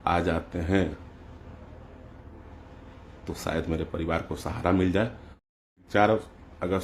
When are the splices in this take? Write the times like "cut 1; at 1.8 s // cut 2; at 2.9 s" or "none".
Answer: cut 1; at 5.7 s